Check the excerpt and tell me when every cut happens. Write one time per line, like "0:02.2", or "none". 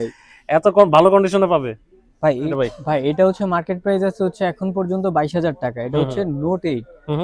0:02.5